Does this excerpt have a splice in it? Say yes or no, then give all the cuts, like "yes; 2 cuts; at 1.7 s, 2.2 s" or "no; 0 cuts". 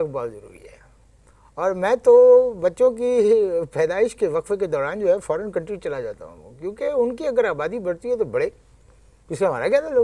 no; 0 cuts